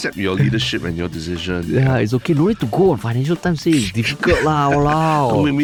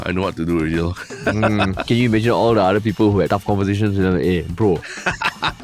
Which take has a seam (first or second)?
second